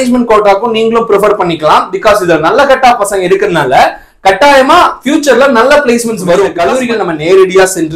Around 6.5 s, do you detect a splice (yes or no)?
yes